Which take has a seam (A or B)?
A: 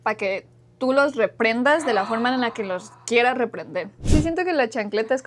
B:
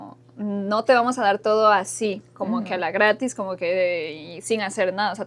A